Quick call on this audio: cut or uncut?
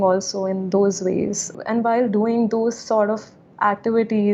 cut